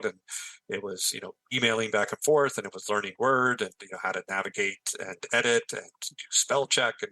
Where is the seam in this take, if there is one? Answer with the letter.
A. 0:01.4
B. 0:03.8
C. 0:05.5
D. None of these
A